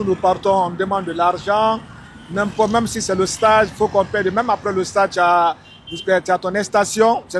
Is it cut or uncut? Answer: uncut